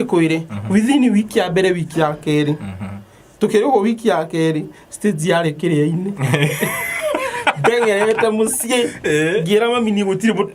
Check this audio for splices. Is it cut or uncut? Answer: uncut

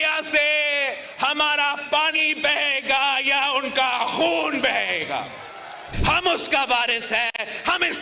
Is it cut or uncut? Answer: cut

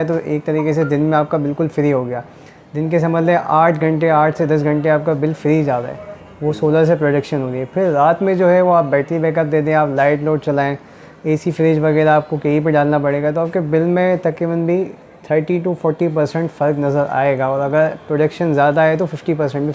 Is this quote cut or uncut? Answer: uncut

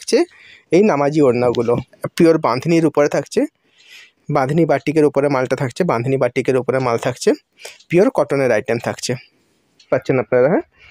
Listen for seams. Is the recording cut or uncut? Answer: cut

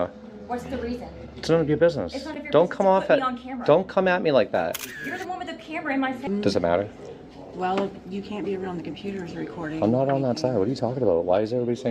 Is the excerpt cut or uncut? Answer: cut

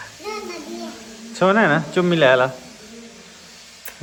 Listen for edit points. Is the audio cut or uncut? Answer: uncut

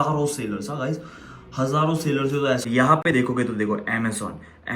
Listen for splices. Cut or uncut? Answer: cut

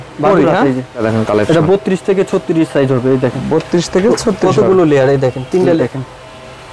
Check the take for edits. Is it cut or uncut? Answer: cut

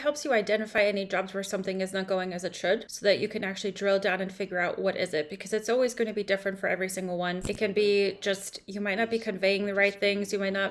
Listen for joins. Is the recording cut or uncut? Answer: cut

